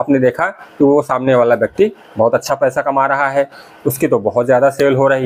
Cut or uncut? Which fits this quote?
uncut